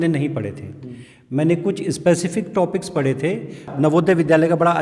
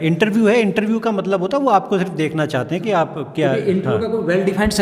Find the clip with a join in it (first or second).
first